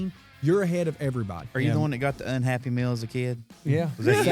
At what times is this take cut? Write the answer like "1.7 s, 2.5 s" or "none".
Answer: 1.5 s